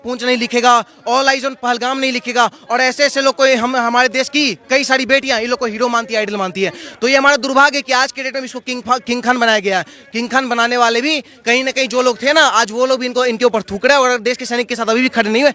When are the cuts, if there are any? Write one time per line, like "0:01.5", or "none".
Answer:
none